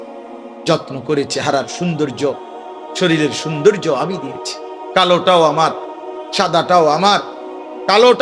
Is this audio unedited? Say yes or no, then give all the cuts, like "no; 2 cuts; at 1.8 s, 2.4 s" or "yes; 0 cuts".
yes; 0 cuts